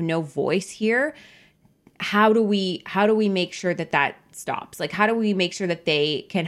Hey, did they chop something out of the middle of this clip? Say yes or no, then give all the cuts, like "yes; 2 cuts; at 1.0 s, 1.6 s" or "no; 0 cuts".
no; 0 cuts